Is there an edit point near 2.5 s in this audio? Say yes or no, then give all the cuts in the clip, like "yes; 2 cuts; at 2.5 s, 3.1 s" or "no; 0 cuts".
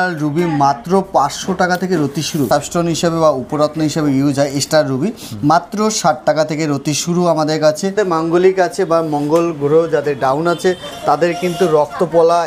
yes; 2 cuts; at 2.5 s, 7.9 s